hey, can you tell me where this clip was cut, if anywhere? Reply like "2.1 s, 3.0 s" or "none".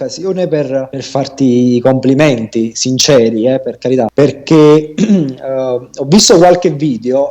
1.0 s, 4.1 s